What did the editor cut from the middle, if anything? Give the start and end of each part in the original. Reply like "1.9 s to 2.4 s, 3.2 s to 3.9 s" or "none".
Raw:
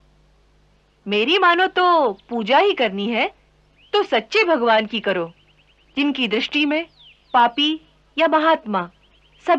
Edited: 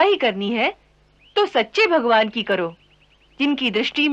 none